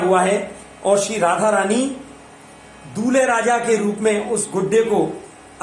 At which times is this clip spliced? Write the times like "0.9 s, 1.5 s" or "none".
none